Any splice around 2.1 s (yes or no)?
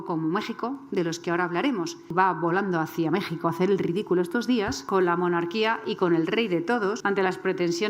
yes